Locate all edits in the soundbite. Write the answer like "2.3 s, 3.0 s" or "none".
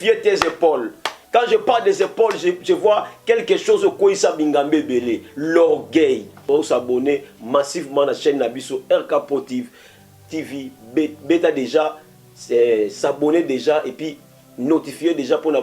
6.5 s